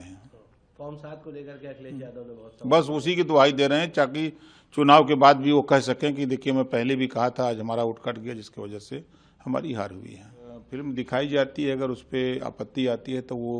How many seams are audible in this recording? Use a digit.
1